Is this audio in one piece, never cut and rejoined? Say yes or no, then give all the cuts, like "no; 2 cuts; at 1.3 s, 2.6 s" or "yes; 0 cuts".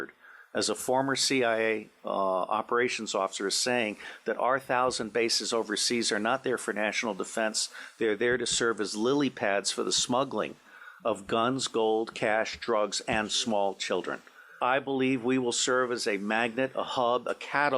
no; 1 cut; at 14.5 s